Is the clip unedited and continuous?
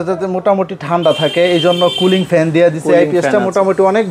yes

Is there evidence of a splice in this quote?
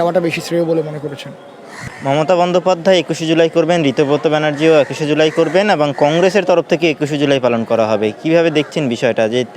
no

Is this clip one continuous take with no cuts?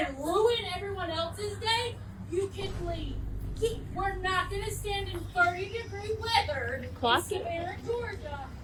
yes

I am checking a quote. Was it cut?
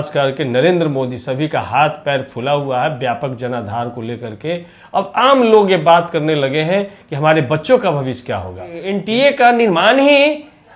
yes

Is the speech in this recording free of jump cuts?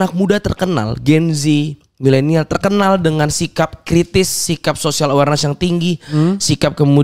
yes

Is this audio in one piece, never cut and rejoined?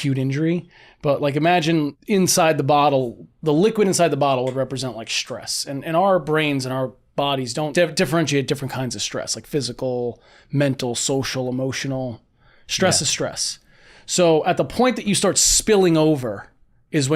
no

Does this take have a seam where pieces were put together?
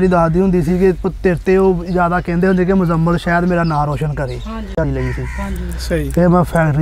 yes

